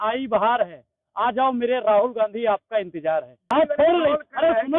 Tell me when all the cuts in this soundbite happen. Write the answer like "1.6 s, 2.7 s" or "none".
3.4 s